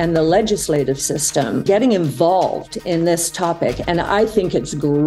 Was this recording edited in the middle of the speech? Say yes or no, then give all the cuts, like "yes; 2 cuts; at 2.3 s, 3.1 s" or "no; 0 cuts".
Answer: yes; 1 cut; at 1.6 s